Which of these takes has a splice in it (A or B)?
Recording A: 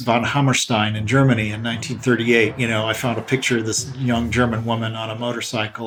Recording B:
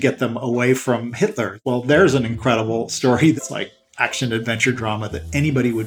B